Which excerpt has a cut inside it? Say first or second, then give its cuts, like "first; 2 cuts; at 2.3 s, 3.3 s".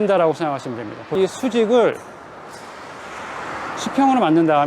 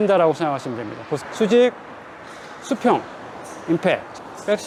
first; 1 cut; at 1.1 s